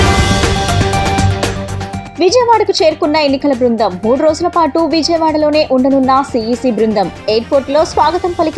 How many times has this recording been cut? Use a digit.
1